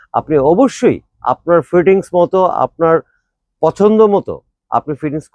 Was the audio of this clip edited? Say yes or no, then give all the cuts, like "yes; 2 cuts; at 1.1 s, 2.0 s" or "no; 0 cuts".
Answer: no; 0 cuts